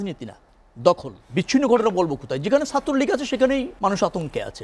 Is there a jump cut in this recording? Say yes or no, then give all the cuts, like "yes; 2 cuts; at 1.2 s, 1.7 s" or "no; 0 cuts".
yes; 2 cuts; at 1.1 s, 3.7 s